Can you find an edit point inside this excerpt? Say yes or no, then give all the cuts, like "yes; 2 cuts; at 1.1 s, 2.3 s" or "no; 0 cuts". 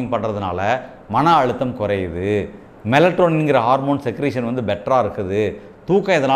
no; 0 cuts